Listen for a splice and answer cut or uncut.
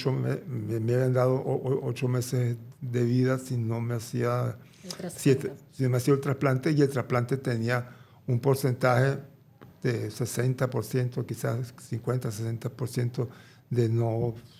uncut